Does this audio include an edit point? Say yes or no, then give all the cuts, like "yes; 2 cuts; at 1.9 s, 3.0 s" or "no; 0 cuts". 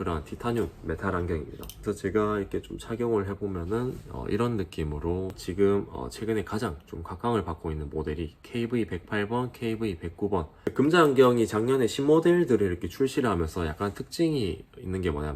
yes; 3 cuts; at 1.7 s, 5.4 s, 10.5 s